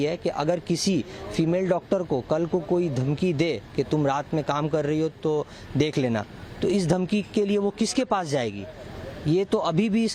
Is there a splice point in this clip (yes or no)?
no